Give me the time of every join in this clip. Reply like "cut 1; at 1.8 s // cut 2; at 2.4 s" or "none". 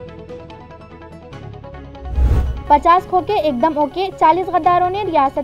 cut 1; at 2.2 s